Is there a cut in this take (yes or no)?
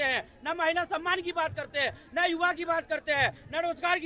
no